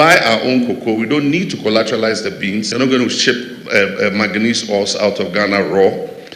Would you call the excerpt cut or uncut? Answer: cut